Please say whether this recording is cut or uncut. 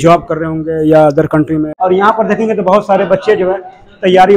cut